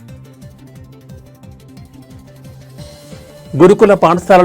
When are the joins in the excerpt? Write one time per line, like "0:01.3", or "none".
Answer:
0:01.3